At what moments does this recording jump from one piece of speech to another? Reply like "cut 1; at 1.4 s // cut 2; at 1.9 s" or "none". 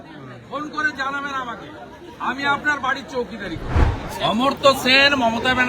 cut 1; at 3.8 s